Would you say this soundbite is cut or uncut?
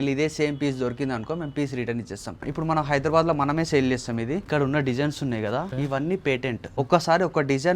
cut